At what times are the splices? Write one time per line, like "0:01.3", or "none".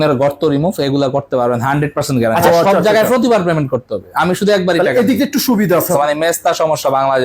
0:02.4
0:05.9